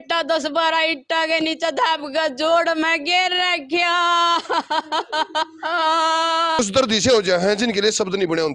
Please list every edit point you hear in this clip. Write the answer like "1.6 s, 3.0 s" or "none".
6.6 s